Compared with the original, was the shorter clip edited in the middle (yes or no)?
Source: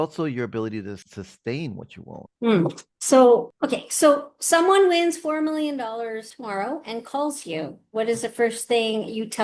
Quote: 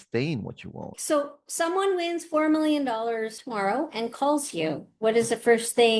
yes